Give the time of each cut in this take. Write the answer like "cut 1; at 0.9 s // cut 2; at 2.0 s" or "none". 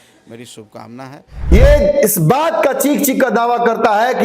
cut 1; at 1.5 s